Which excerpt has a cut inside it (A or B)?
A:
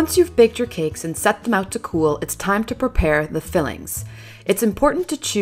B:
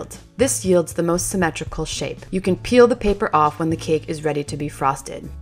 A